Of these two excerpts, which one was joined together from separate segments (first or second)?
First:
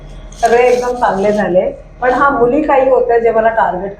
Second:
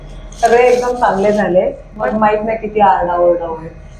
second